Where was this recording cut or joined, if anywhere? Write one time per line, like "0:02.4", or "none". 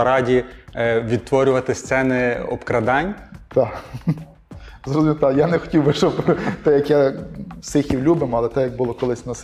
none